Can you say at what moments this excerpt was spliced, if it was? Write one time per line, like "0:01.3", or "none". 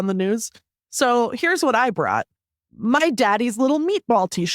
0:02.7